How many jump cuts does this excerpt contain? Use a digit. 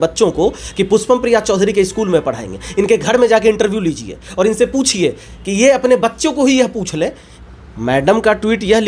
1